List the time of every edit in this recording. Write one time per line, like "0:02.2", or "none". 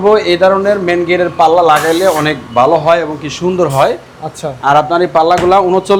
none